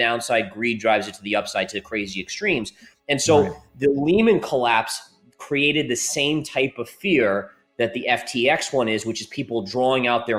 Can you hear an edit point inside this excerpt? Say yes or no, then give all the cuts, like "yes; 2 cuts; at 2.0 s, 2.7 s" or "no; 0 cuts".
no; 0 cuts